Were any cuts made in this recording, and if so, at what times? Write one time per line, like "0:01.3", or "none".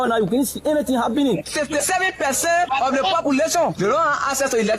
0:02.7